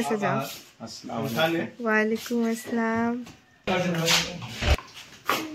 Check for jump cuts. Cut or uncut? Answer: cut